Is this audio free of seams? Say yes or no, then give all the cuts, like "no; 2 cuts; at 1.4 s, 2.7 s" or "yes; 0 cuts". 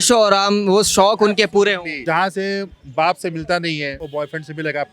no; 2 cuts; at 1.9 s, 4.0 s